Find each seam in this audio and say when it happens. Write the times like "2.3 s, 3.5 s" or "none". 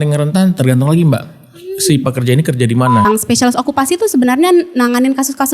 3.1 s

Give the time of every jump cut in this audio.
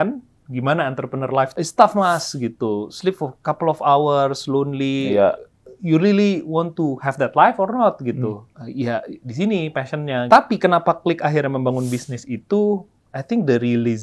1.6 s, 8.5 s, 10.3 s

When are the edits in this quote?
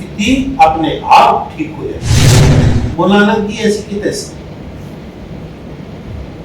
2.4 s

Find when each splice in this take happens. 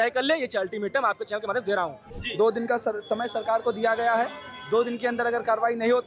2.0 s

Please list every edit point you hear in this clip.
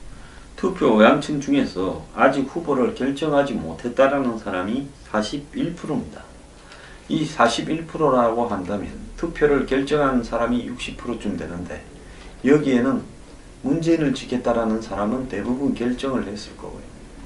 none

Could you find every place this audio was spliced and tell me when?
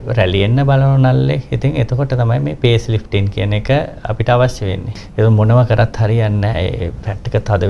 5.0 s

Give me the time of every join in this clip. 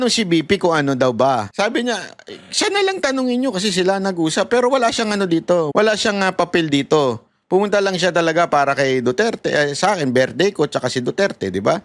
1.5 s, 5.7 s

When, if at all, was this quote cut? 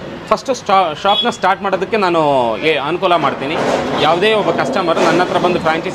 none

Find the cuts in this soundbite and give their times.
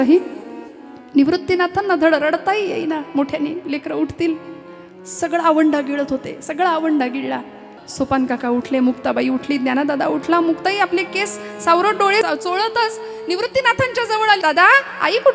7.8 s, 12.2 s, 14.4 s

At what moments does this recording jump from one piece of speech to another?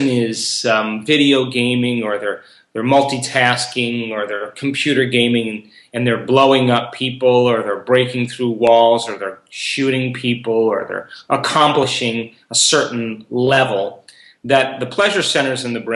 none

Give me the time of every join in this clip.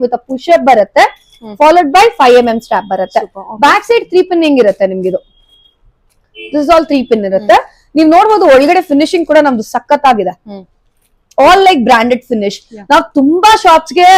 none

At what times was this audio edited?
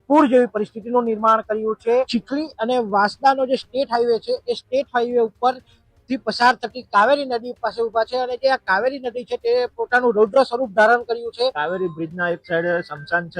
2.2 s, 11.6 s

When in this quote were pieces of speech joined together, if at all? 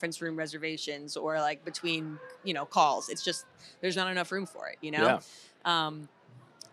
none

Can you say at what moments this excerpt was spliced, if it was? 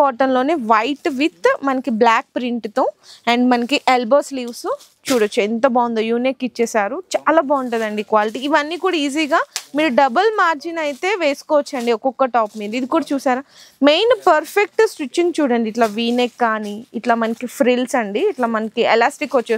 none

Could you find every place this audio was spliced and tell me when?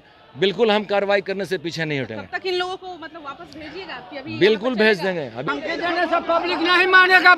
5.4 s

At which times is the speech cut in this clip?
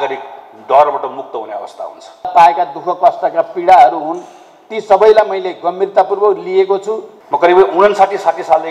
2.3 s, 7.1 s

